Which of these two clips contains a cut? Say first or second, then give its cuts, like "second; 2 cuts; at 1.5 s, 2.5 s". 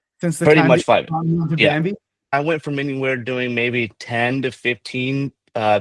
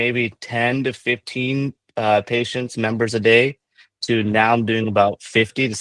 first; 1 cut; at 2.3 s